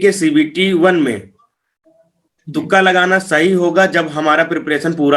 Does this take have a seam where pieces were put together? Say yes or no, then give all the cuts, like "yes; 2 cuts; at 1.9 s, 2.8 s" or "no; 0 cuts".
no; 0 cuts